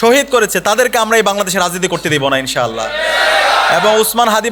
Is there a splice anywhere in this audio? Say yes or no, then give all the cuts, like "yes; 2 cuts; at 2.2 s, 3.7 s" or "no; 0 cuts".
no; 0 cuts